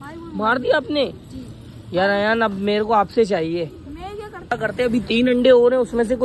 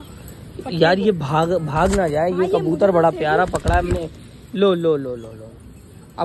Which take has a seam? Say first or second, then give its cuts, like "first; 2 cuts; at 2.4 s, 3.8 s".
first; 1 cut; at 4.5 s